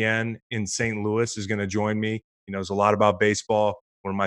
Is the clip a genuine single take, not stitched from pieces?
yes; 0 cuts

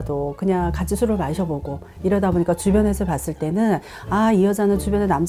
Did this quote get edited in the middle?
no; 0 cuts

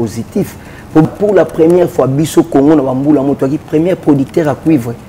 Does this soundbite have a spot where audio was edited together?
yes; 1 cut; at 1.0 s

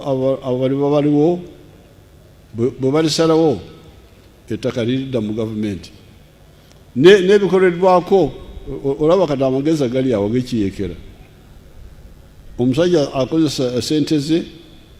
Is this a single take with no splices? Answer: yes; 0 cuts

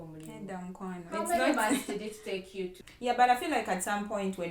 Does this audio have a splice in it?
yes; 1 cut; at 2.8 s

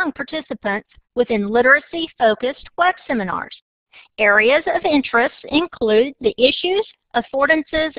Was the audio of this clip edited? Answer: yes; 1 cut; at 3.1 s

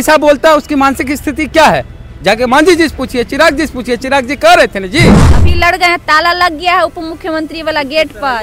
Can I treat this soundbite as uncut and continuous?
no; 1 cut; at 5.3 s

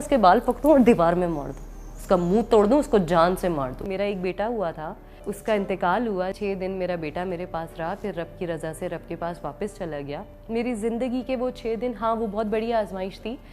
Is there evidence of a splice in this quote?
yes; 4 cuts; at 3.8 s, 5.2 s, 6.3 s, 10.3 s

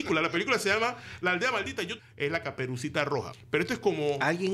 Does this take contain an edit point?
yes; 2 cuts; at 1.9 s, 3.4 s

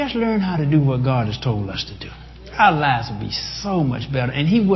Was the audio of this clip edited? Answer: no; 0 cuts

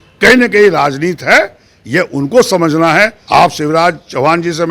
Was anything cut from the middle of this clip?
yes; 1 cut; at 3.2 s

